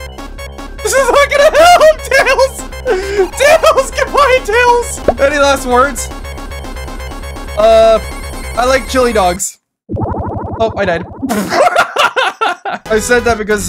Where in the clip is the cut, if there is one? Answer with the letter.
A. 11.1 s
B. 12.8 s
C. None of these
B